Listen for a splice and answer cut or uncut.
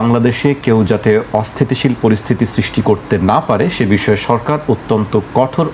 uncut